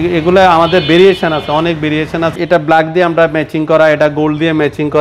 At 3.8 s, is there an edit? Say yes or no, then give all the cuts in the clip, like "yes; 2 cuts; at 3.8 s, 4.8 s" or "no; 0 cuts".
no; 1 cut; at 2.3 s